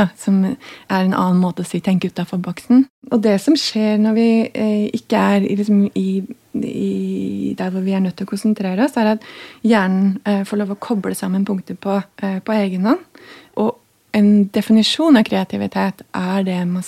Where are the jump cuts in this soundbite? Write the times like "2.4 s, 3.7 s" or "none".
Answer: 2.9 s, 12.1 s, 13.4 s